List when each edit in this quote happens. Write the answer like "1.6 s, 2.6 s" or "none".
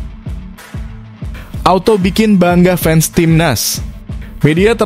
1.6 s